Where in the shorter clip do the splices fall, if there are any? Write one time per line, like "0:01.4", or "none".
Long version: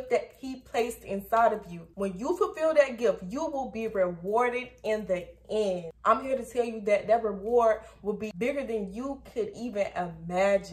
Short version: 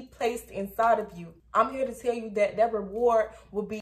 0:01.4